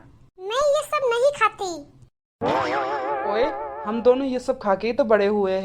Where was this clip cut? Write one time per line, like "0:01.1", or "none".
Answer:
none